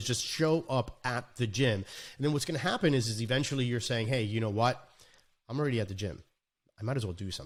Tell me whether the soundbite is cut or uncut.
uncut